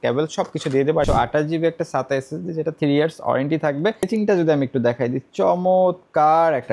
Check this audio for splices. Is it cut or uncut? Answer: cut